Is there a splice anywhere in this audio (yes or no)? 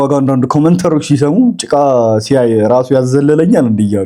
no